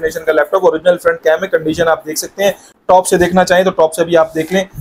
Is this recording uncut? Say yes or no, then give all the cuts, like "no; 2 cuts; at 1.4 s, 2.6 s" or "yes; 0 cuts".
yes; 0 cuts